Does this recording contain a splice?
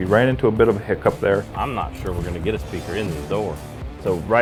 no; 0 cuts

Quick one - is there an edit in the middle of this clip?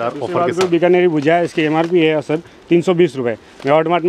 no; 0 cuts

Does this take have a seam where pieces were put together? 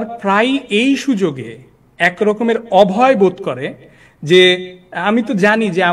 no; 0 cuts

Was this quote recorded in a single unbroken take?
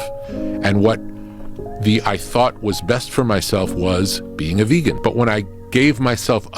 no; 1 cut; at 5.0 s

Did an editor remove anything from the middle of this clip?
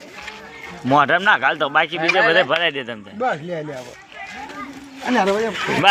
no; 0 cuts

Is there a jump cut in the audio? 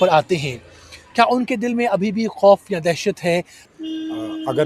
yes; 1 cut; at 3.6 s

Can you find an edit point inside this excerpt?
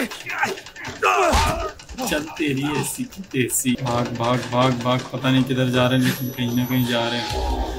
yes; 1 cut; at 3.8 s

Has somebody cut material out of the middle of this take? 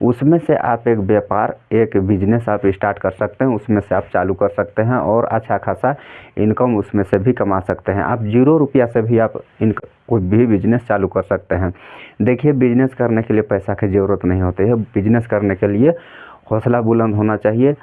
no; 0 cuts

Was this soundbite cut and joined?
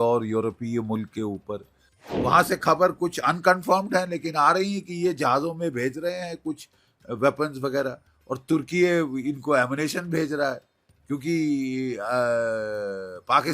yes; 1 cut; at 2.2 s

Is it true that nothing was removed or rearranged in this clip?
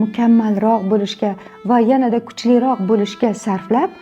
yes; 0 cuts

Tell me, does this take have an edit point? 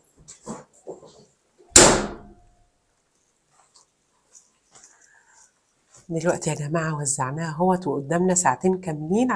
no; 0 cuts

